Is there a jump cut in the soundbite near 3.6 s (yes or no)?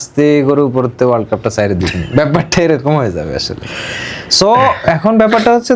no